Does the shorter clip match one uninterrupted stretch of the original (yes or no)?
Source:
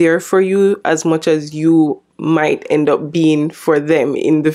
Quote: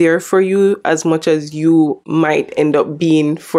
no